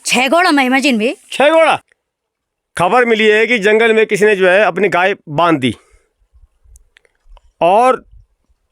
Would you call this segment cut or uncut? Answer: cut